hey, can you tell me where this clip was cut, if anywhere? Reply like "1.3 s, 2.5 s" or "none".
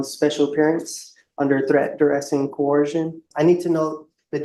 3.3 s